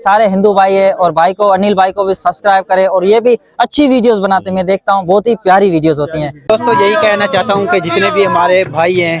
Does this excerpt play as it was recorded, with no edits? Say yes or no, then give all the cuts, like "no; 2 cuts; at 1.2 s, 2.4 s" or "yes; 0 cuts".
no; 1 cut; at 6.4 s